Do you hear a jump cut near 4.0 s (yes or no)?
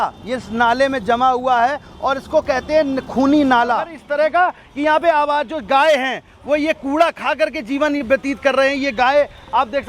yes